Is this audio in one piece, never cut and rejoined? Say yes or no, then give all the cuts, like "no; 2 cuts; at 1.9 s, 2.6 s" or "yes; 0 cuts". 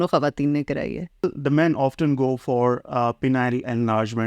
no; 1 cut; at 1.2 s